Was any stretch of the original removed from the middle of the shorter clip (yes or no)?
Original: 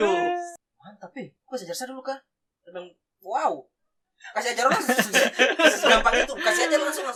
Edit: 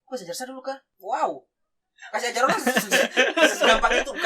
yes